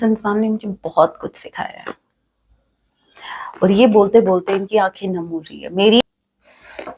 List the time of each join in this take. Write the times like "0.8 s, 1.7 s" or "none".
6.0 s